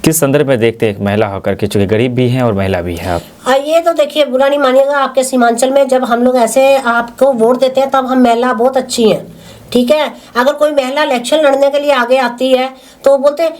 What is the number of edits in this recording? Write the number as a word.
zero